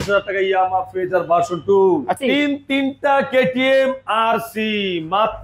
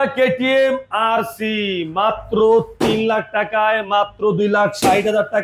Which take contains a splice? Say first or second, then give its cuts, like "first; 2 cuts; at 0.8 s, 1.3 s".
first; 1 cut; at 2.2 s